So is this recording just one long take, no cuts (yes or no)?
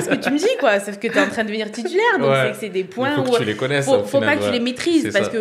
yes